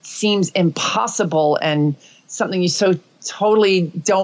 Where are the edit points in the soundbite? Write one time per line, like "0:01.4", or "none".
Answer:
none